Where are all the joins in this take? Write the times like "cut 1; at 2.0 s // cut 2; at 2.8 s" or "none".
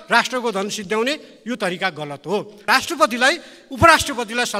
cut 1; at 2.7 s